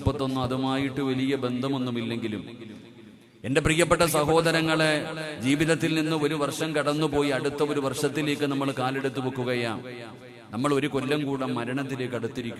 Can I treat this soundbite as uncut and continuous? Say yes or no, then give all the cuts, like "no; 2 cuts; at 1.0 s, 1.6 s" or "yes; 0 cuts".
yes; 0 cuts